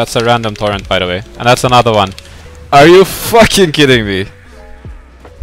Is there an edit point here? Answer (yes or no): no